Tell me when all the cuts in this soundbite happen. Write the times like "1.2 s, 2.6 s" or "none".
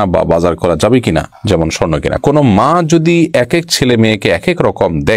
2.2 s